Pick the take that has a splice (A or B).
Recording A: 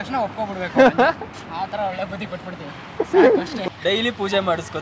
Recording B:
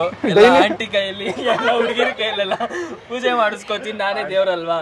A